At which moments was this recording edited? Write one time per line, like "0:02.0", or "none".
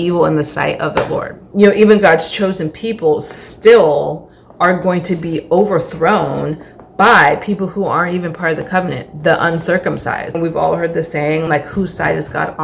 0:01.4
0:10.4